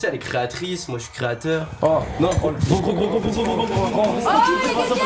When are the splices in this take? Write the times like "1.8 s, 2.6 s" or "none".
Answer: none